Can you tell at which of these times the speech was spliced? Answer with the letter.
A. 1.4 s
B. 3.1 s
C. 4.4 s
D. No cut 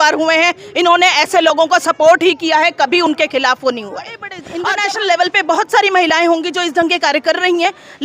C